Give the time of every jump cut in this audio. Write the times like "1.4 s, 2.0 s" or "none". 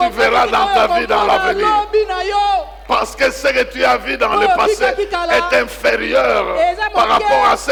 none

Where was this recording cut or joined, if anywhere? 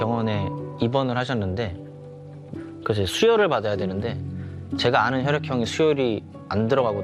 none

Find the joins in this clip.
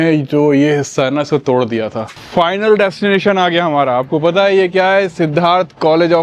2.1 s

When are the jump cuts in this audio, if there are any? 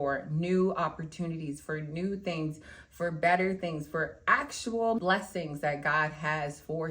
5.0 s

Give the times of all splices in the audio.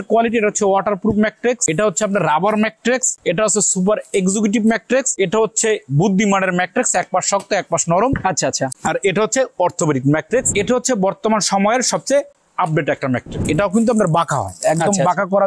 1.6 s, 3.2 s, 5.1 s, 8.7 s, 10.5 s, 13.4 s

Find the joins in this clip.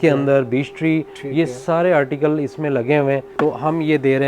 3.3 s

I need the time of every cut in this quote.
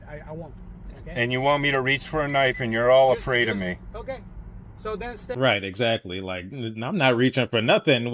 none

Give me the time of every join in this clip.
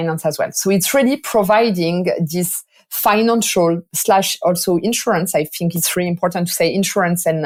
none

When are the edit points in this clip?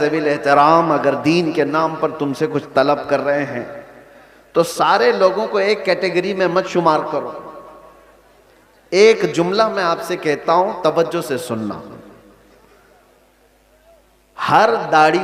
none

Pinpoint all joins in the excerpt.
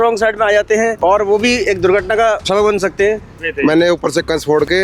0.9 s, 2.4 s, 3.4 s

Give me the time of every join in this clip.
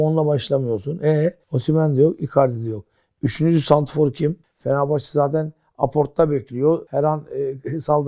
4.4 s, 6.9 s

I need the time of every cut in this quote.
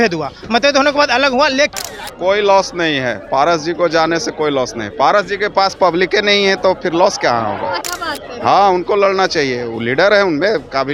1.7 s, 7.8 s

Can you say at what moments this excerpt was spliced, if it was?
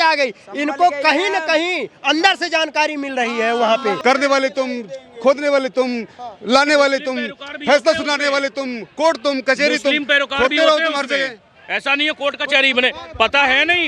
4.0 s

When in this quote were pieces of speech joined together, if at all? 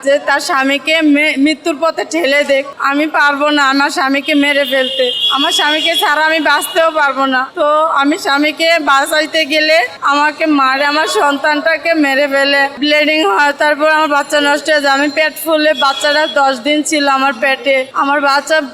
none

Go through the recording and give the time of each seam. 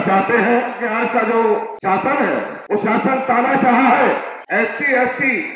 0.8 s, 1.7 s, 2.6 s, 4.4 s

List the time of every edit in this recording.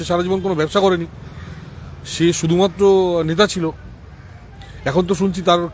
none

